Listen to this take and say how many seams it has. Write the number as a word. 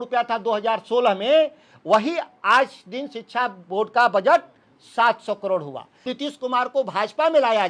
one